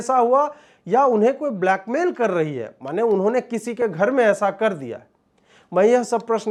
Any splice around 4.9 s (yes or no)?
no